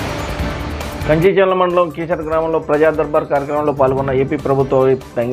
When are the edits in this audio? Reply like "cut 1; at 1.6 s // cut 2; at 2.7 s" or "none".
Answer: cut 1; at 1.0 s

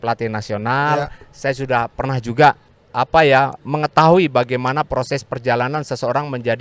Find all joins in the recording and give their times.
cut 1; at 2.8 s

